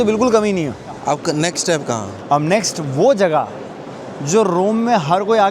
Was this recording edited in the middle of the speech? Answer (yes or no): yes